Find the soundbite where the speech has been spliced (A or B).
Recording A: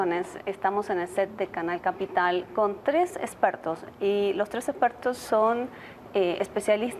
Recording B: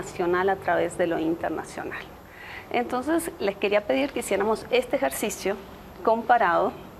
A